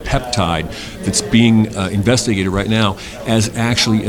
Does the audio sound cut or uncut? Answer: uncut